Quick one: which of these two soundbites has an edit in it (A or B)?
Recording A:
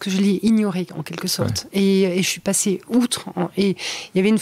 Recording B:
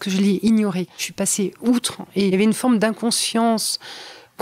B